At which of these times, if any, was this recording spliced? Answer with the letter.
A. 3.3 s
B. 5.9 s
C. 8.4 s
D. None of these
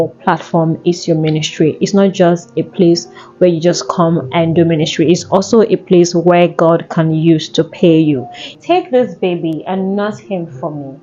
C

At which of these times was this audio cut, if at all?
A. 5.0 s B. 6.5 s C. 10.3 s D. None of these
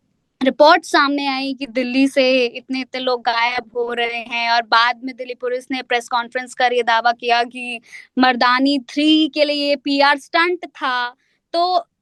D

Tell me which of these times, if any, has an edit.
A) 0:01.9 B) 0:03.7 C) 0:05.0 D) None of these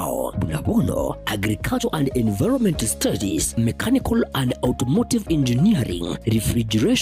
A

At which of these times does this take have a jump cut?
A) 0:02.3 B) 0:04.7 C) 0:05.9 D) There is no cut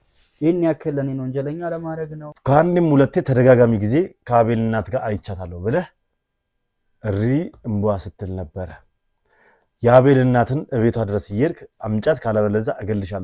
A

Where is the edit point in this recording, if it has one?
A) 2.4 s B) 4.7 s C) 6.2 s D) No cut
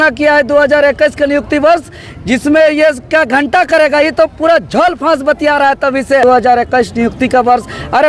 C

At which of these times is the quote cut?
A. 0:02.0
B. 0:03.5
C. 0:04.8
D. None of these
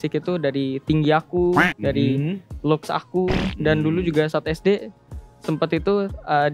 D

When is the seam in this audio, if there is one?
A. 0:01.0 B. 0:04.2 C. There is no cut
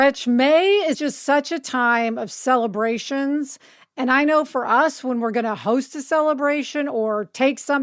A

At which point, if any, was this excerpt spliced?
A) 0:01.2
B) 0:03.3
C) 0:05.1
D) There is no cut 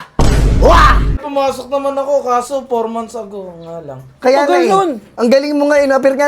A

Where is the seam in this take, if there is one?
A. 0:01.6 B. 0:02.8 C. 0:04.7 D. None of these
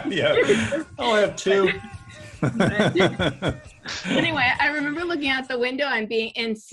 D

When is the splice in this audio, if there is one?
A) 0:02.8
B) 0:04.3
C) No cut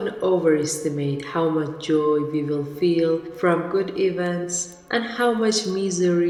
C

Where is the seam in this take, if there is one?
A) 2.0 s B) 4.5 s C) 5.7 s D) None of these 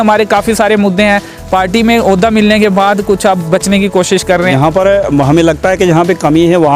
B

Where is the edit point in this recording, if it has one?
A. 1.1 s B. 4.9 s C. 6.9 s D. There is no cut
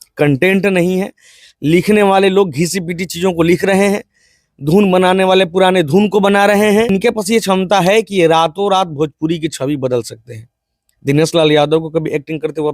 C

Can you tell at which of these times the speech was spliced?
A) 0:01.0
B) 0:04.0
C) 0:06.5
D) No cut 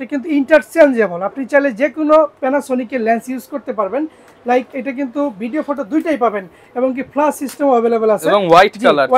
D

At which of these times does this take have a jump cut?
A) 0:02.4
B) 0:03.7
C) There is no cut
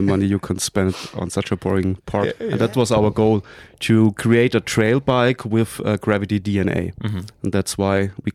A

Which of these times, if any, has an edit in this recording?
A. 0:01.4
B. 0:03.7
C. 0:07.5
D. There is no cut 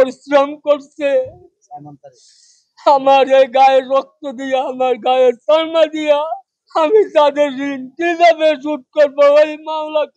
D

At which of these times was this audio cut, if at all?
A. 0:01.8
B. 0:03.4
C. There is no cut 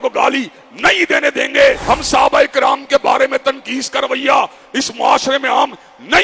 A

